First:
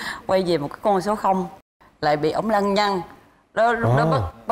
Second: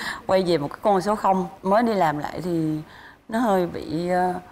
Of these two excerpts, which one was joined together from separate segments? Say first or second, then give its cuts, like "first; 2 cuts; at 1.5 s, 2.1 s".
first; 1 cut; at 1.6 s